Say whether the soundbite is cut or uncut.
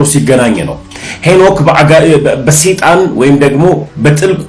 uncut